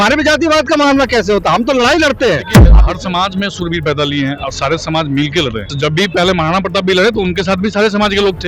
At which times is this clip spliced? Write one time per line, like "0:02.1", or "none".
0:02.7
0:05.7